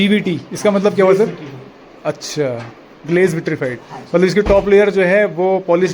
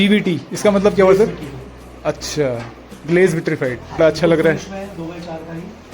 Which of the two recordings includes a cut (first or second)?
second